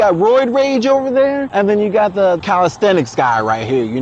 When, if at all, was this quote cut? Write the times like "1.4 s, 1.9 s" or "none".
1.5 s, 2.4 s